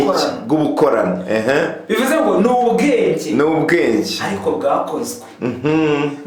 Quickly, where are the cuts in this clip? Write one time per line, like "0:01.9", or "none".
none